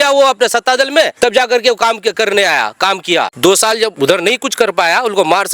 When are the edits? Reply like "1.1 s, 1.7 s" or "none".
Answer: 1.1 s, 3.3 s, 3.9 s